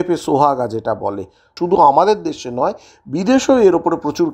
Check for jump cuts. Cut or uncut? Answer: cut